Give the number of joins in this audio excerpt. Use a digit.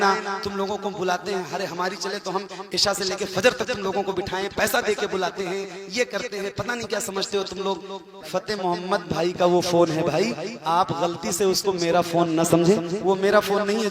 1